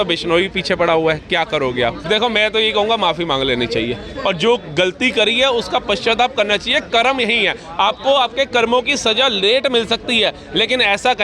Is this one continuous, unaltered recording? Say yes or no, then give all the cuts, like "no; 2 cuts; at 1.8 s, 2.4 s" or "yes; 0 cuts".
no; 1 cut; at 2.0 s